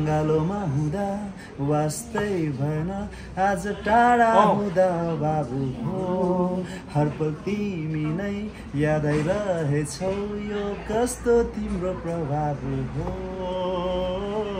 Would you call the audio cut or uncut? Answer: uncut